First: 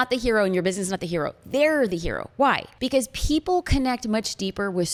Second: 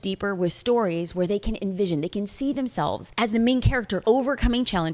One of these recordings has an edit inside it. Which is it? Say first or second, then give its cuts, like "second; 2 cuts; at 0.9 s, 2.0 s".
second; 2 cuts; at 3.1 s, 3.9 s